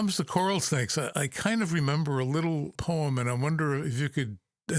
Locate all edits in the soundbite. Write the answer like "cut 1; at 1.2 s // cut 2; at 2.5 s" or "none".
cut 1; at 1.1 s // cut 2; at 2.8 s